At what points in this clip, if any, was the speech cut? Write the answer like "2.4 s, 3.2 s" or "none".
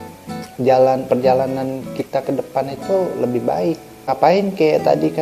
4.0 s